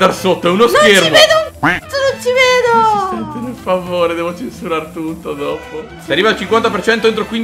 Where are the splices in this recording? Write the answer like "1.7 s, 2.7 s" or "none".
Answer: 6.0 s